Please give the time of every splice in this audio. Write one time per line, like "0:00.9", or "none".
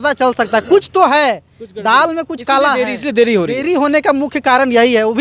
none